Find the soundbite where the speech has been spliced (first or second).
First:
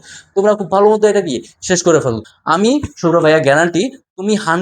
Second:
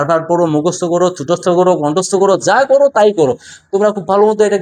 first